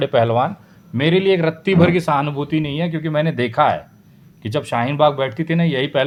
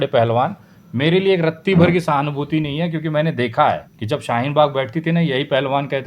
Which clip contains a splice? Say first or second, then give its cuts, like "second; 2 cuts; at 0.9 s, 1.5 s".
second; 1 cut; at 3.9 s